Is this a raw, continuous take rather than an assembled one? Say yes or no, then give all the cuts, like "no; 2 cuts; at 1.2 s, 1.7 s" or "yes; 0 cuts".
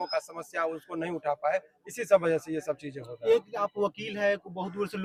yes; 0 cuts